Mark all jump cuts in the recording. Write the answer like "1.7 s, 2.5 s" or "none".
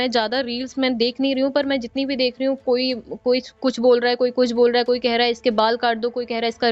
none